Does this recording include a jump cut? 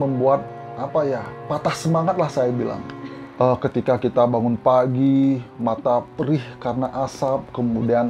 no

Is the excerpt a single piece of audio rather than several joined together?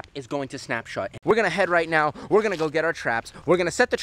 no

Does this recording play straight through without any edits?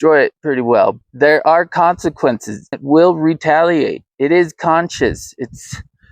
no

